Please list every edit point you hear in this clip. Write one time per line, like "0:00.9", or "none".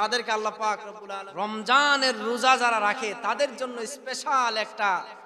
0:01.0